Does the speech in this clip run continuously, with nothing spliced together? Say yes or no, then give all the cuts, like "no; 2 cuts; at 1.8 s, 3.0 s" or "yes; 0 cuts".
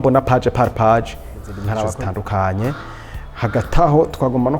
no; 1 cut; at 1.9 s